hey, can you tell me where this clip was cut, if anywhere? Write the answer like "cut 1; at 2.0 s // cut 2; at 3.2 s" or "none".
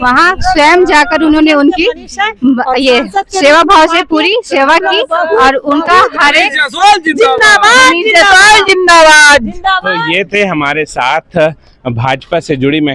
none